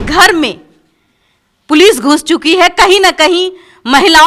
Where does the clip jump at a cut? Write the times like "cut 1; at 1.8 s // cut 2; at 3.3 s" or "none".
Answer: none